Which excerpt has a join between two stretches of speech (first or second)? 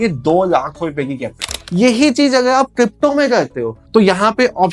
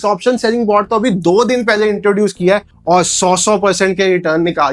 first